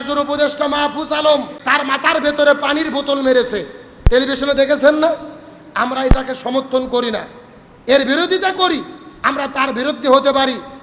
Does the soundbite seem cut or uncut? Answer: cut